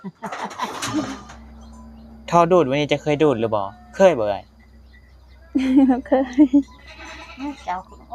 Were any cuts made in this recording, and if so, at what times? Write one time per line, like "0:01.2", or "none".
0:01.3